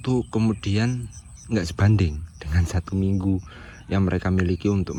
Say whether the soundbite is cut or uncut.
uncut